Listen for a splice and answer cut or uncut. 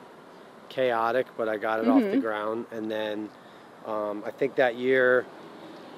uncut